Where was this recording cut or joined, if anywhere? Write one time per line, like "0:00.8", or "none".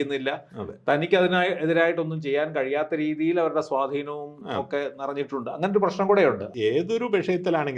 0:06.5